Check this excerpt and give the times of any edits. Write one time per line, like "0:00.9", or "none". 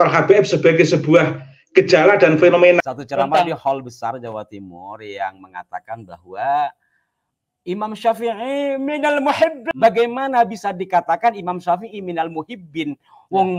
0:02.8
0:09.6